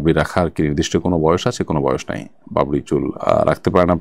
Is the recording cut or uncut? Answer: uncut